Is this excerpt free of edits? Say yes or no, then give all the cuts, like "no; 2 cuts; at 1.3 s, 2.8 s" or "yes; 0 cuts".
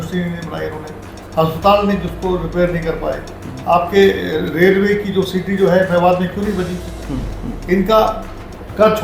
no; 1 cut; at 7.3 s